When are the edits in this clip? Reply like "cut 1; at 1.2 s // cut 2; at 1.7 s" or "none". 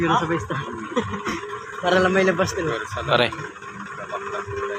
none